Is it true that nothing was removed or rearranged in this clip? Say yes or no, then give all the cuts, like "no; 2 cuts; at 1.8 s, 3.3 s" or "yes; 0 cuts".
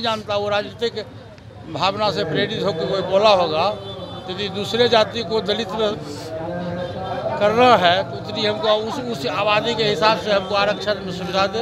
yes; 0 cuts